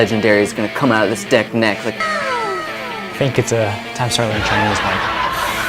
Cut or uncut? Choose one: cut